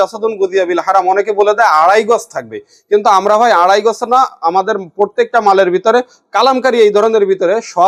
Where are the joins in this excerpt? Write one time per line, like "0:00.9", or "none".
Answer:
none

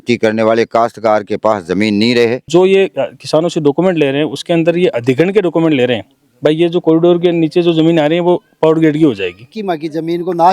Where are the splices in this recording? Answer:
0:02.5
0:09.5

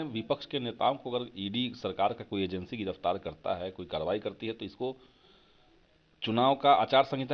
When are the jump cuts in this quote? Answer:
none

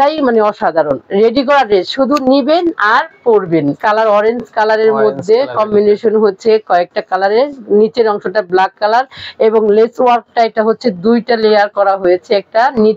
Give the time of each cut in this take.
0:01.0
0:03.8

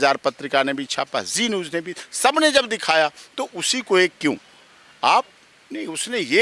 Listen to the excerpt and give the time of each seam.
none

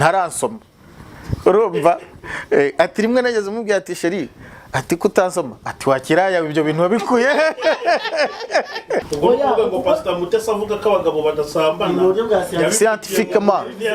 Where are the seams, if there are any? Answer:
0:09.1

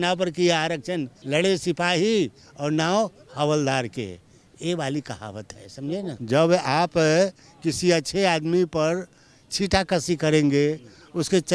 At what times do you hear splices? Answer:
0:01.1
0:06.1

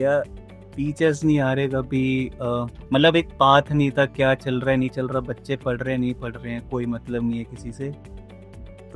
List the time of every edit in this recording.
none

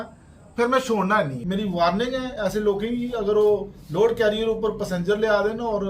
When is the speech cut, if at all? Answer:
0:01.4

